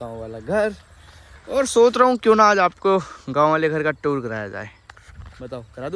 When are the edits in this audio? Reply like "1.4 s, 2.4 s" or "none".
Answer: none